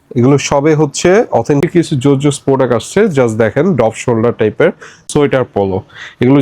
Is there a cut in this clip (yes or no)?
yes